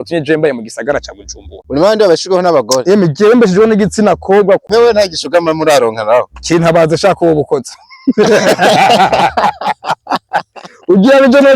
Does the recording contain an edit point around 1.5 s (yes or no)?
yes